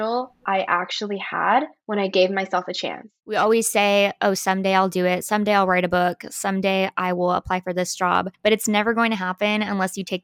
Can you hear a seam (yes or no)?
yes